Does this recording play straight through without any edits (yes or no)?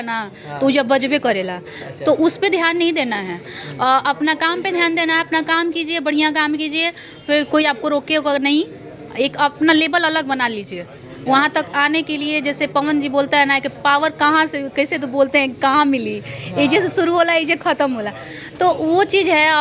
yes